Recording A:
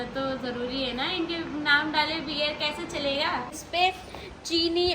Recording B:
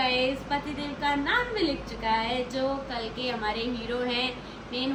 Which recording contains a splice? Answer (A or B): A